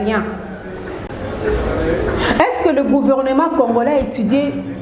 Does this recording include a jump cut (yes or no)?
no